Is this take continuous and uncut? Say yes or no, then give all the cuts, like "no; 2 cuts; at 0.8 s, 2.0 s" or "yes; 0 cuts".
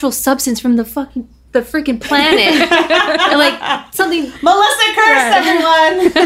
yes; 0 cuts